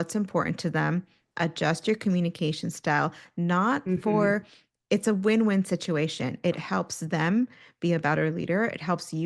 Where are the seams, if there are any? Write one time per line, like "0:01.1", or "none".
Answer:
none